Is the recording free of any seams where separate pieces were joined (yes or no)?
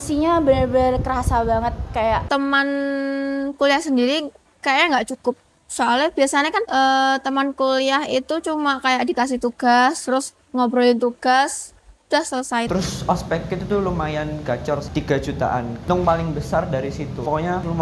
no